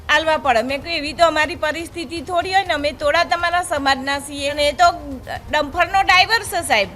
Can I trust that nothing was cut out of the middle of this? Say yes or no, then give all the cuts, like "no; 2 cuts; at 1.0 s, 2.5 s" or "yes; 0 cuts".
no; 1 cut; at 4.5 s